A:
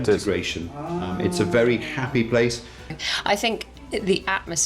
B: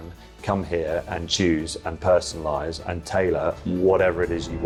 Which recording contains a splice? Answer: A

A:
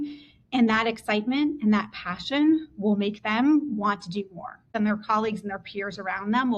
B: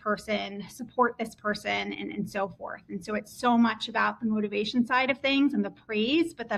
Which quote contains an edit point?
A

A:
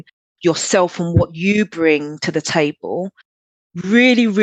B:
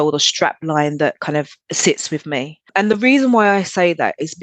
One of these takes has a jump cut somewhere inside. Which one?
B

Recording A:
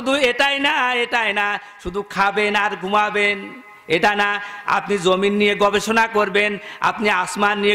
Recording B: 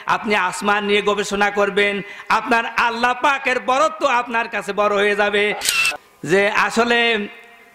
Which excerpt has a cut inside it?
B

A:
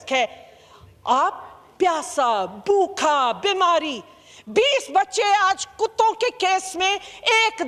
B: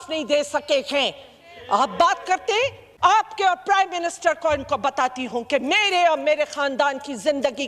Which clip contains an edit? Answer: B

